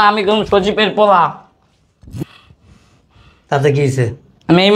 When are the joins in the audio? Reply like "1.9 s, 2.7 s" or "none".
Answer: none